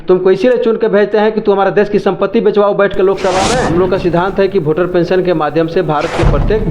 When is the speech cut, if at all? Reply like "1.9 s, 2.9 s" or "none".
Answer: 3.6 s